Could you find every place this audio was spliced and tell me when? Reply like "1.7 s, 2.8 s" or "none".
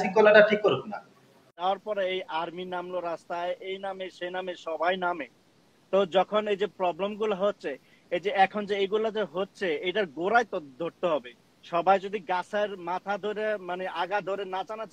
1.6 s